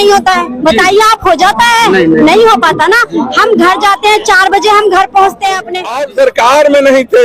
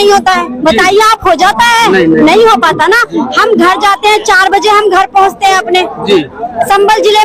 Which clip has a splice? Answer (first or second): first